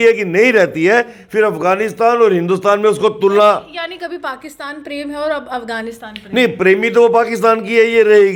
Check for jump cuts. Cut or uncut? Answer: uncut